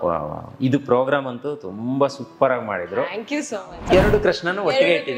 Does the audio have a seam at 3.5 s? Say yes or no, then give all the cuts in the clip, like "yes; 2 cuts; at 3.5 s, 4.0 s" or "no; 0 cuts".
yes; 1 cut; at 3.5 s